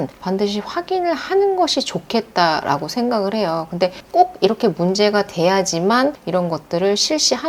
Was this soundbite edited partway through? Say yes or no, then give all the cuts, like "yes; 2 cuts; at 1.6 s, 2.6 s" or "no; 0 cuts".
no; 0 cuts